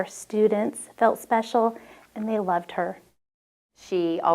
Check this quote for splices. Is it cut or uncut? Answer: cut